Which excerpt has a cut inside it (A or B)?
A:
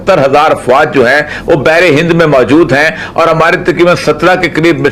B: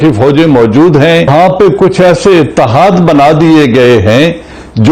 B